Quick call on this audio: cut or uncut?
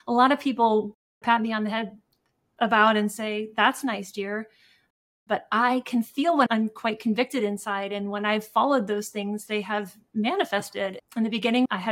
cut